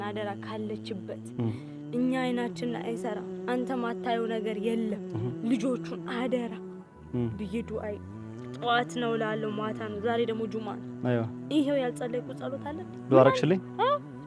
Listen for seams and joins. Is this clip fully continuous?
yes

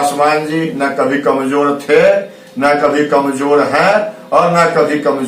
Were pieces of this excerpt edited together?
no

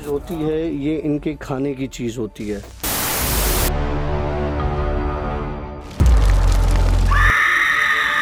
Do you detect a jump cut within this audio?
no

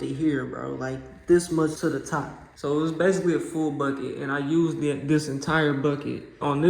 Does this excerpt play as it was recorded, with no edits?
no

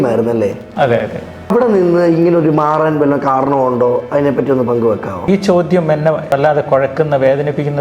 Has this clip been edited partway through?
yes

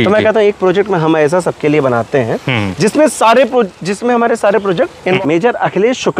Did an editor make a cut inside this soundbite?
yes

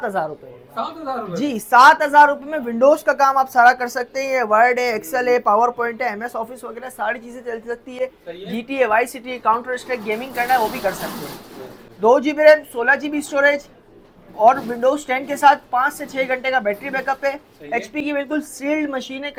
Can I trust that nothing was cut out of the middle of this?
yes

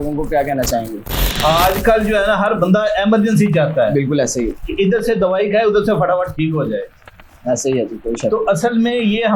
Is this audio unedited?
no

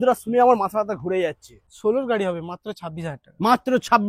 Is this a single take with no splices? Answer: no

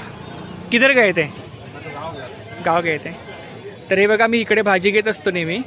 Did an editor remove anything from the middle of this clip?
no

